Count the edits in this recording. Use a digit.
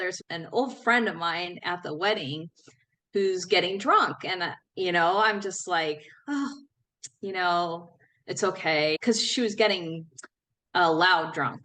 0